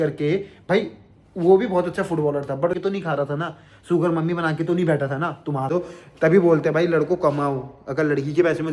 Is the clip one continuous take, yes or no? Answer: no